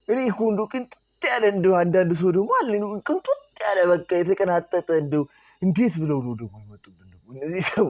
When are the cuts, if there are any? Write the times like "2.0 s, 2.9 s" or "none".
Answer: none